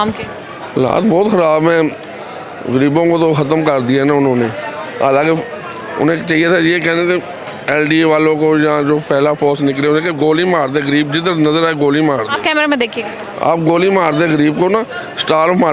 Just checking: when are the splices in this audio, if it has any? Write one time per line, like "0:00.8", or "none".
none